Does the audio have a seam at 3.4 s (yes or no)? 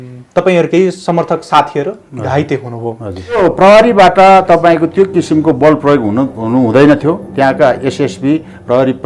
yes